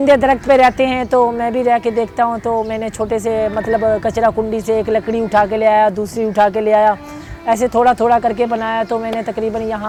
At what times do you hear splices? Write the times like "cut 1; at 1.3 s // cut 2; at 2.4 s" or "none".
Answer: none